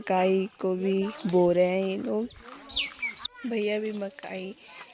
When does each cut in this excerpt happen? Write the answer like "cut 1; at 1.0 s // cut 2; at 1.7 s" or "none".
none